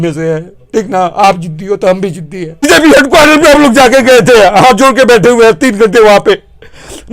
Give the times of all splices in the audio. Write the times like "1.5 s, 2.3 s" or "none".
2.7 s